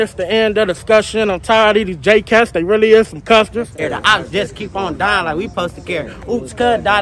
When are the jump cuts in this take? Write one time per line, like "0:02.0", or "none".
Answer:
0:03.8